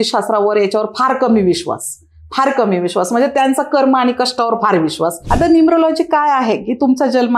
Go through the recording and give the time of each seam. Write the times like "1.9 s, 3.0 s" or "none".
5.2 s